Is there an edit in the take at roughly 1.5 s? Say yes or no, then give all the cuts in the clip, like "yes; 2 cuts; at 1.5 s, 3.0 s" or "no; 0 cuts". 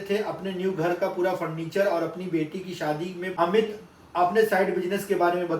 no; 1 cut; at 3.3 s